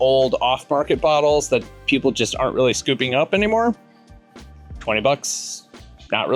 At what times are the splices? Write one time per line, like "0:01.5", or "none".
none